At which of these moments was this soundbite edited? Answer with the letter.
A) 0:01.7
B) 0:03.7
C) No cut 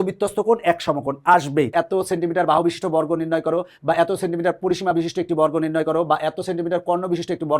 A